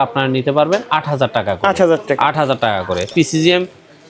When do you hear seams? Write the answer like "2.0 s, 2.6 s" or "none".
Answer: 3.1 s